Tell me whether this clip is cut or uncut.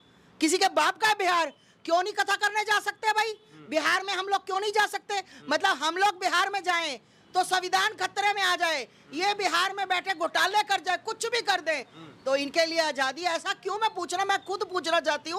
uncut